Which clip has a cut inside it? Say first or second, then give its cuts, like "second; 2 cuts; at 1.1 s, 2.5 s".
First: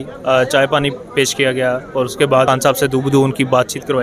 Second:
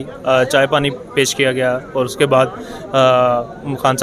first; 1 cut; at 2.5 s